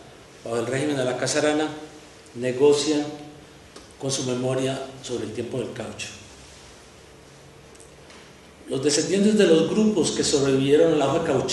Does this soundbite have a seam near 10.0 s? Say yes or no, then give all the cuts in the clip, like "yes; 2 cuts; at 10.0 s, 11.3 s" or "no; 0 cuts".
yes; 1 cut; at 10.0 s